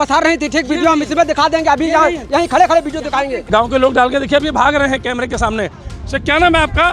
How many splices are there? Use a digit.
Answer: 1